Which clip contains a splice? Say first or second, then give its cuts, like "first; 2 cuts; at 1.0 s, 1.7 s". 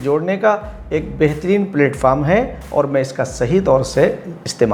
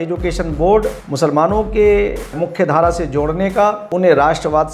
second; 3 cuts; at 1.0 s, 2.4 s, 3.8 s